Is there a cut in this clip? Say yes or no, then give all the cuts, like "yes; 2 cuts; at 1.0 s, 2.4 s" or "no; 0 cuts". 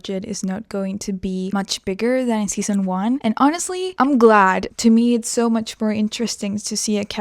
yes; 4 cuts; at 1.5 s, 3.2 s, 3.9 s, 4.7 s